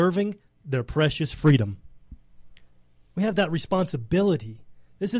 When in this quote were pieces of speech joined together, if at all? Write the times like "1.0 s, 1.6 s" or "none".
none